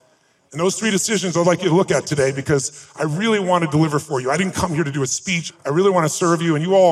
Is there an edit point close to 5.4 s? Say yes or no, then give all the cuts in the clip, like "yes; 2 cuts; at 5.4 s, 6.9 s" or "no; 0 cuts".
yes; 1 cut; at 5.4 s